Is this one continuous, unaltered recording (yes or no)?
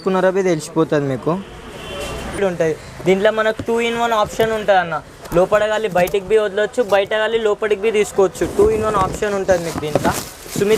no